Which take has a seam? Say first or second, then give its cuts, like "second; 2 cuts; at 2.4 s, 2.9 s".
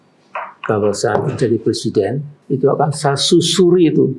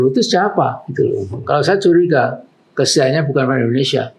first; 1 cut; at 2.3 s